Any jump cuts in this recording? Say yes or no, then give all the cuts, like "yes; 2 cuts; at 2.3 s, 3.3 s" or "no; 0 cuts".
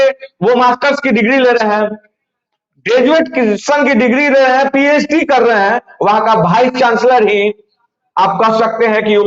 no; 0 cuts